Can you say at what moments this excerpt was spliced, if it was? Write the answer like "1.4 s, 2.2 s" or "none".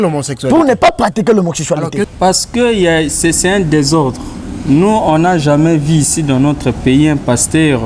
2.1 s